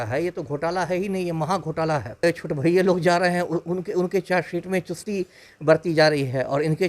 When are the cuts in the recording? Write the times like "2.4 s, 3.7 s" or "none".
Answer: 2.2 s

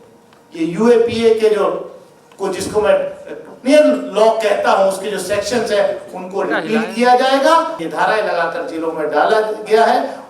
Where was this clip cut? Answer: 7.8 s

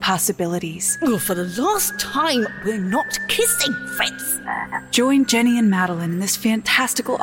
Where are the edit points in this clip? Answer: 0.9 s, 4.8 s

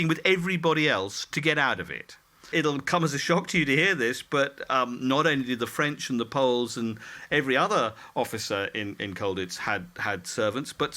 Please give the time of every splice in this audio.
2.5 s

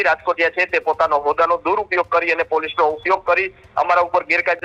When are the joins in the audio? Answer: none

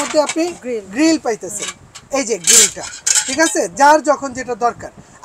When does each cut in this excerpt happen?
none

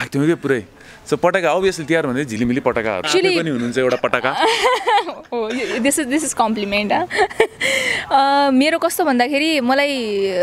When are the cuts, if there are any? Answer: 3.1 s

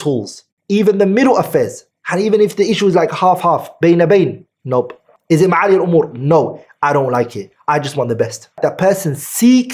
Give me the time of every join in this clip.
none

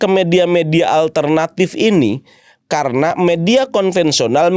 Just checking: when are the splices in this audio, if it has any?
none

